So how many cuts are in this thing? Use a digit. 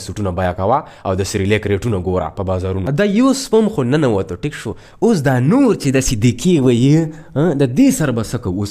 1